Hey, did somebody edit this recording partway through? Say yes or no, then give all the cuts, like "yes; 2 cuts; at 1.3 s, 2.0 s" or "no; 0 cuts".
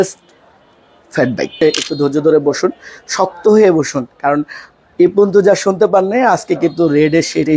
yes; 1 cut; at 1.5 s